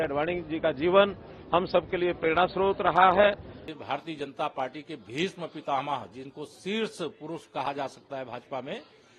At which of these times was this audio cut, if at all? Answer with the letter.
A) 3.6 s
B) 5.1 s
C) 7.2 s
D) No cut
A